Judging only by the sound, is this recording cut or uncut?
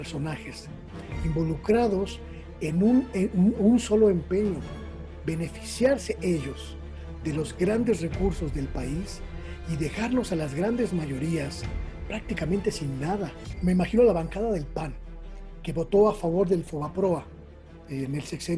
cut